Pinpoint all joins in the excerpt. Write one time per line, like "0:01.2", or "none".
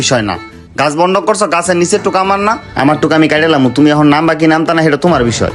none